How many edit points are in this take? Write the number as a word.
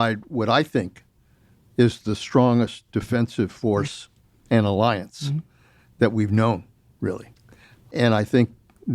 zero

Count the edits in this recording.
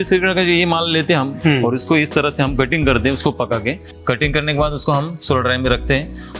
two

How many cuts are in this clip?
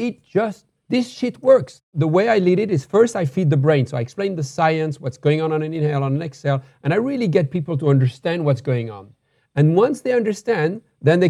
one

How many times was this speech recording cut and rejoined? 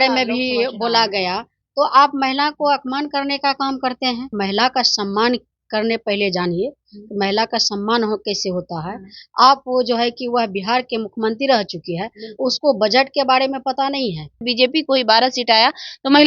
two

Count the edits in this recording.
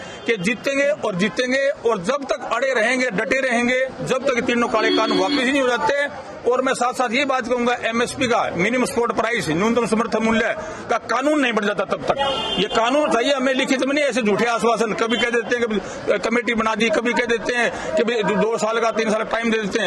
zero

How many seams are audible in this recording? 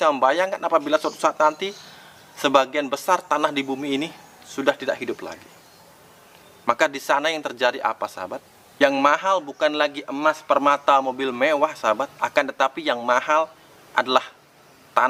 zero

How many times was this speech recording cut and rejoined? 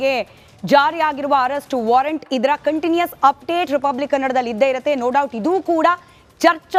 zero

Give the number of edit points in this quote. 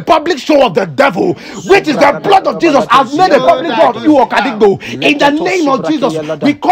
zero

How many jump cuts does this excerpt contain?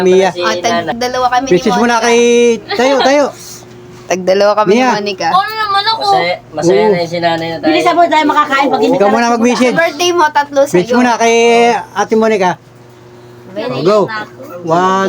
one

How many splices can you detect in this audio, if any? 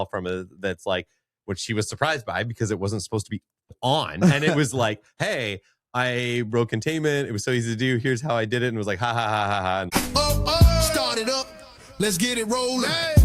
two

